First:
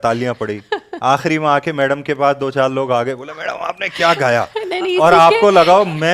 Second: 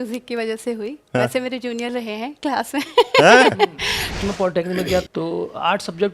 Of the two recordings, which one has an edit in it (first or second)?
second